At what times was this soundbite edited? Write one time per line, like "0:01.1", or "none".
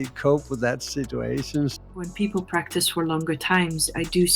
0:01.7

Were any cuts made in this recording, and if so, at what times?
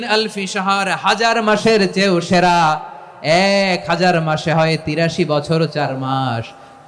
none

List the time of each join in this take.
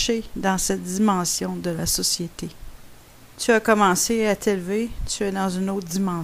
0:02.1

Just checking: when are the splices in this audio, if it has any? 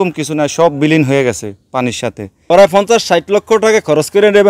0:02.3

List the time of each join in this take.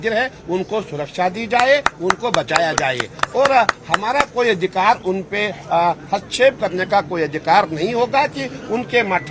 none

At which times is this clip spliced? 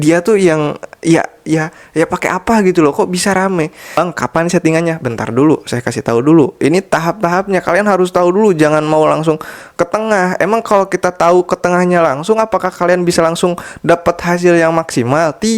0:04.0

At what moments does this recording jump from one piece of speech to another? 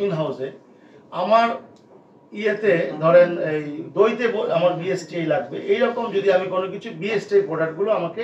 none

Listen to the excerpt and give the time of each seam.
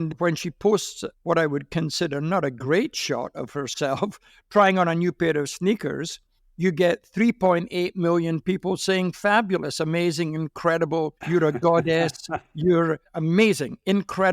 0:13.1

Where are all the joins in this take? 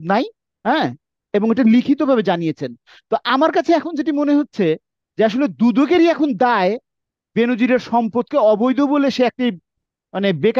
none

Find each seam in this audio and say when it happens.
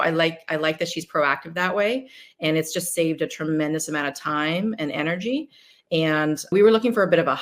0:06.5

